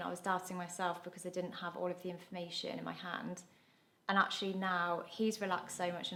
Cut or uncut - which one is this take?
uncut